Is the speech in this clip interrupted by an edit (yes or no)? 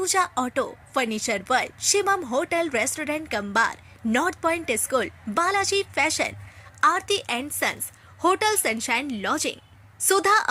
no